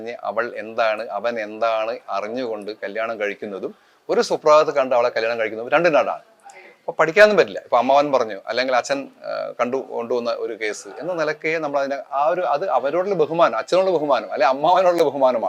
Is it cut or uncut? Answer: uncut